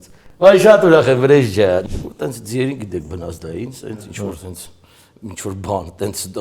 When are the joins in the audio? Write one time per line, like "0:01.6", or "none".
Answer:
0:01.9